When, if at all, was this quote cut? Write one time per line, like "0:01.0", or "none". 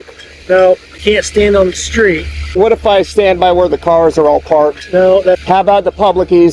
0:00.9
0:02.5
0:05.4